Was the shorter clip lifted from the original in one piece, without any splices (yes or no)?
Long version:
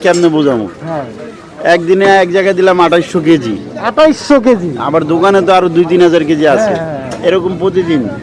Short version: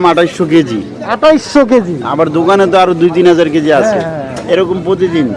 yes